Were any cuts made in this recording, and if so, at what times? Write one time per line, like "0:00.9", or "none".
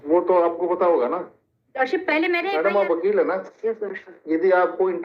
0:02.5